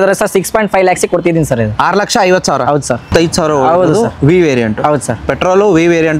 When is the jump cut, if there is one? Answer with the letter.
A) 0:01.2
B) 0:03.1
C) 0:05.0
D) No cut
B